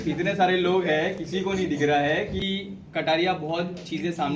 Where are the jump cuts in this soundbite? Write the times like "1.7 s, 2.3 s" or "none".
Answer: 2.4 s

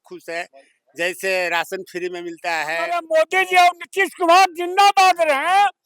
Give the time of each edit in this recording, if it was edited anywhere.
3.0 s

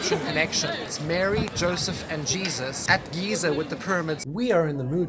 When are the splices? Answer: 0.9 s, 2.8 s, 4.2 s

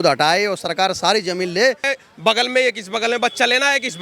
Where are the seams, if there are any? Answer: 1.9 s

